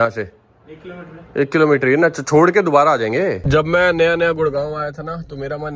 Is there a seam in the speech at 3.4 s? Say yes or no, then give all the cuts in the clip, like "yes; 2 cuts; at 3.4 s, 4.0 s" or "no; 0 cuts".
yes; 1 cut; at 3.4 s